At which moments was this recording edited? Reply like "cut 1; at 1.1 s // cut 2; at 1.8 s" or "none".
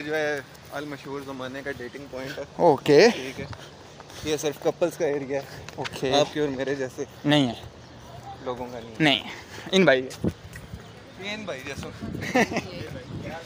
none